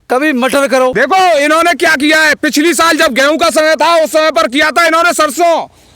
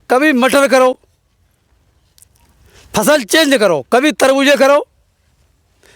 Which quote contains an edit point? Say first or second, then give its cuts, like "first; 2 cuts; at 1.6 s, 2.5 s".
first; 1 cut; at 0.9 s